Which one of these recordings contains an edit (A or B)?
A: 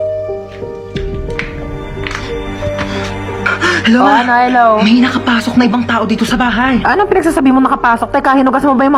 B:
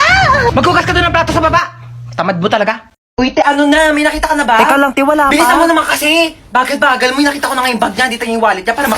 B